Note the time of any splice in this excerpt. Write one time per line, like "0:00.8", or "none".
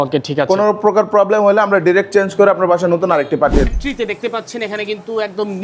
0:03.6